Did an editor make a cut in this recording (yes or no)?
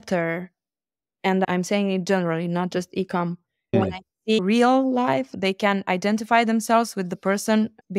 no